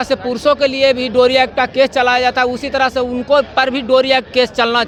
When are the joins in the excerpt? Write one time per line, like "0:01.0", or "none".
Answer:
none